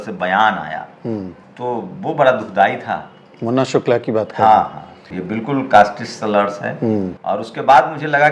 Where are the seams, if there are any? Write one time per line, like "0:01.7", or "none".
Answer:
0:01.4
0:05.1
0:07.2